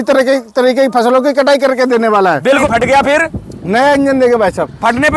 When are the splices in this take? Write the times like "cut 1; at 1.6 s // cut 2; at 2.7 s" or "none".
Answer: cut 1; at 2.5 s